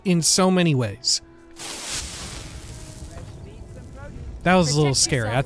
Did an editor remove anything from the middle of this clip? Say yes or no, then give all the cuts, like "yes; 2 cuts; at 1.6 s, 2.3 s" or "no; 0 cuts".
yes; 1 cut; at 4.4 s